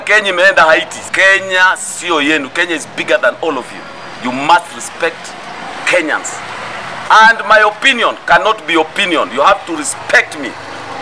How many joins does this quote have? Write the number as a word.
one